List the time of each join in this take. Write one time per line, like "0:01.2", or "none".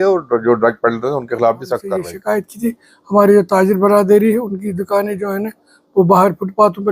0:02.1